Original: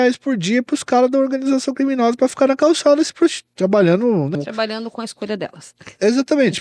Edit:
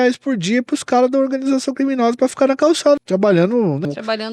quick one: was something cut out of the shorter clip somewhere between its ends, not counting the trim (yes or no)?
yes